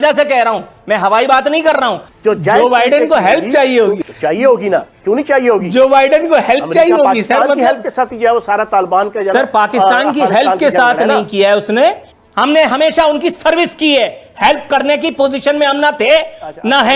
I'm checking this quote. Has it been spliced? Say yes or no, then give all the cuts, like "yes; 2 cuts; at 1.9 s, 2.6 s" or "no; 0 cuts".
yes; 3 cuts; at 2.1 s, 4.0 s, 12.1 s